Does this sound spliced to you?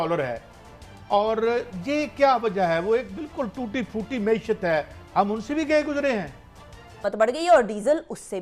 yes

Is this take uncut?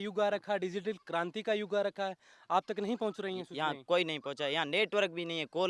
yes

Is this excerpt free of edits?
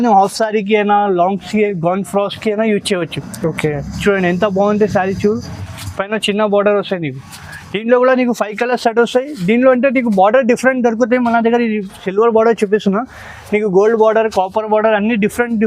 yes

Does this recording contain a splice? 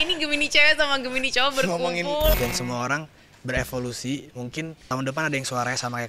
yes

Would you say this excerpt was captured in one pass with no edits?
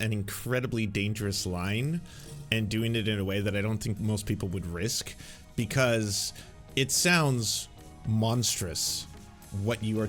yes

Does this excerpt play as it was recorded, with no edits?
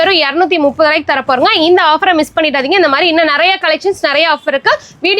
yes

